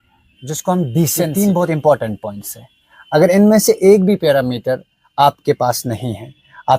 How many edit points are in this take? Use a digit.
1